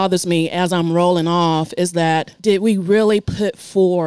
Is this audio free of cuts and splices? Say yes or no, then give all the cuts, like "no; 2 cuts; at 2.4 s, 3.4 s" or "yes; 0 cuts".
no; 1 cut; at 2.3 s